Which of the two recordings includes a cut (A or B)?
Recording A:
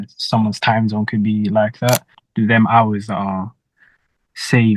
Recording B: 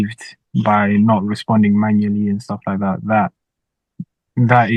A